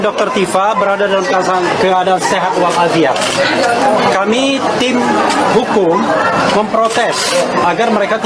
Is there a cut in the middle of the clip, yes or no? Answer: no